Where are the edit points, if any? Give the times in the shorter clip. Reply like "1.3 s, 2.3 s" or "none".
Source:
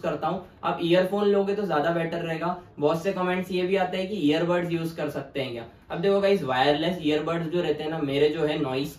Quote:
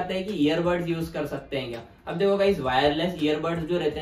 none